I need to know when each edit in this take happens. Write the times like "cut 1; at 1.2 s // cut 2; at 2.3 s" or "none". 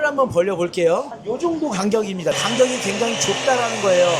cut 1; at 1.1 s // cut 2; at 2.4 s